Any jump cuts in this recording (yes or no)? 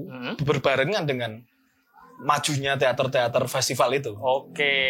no